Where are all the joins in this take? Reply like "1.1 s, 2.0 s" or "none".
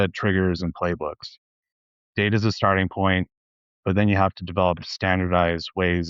none